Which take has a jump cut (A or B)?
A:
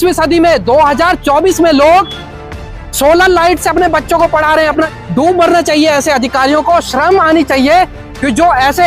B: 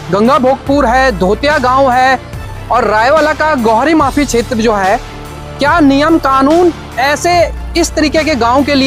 A